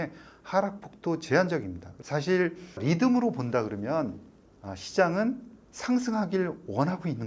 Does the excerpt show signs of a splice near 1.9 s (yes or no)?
yes